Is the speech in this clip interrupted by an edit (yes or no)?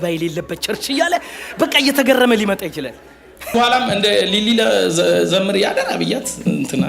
yes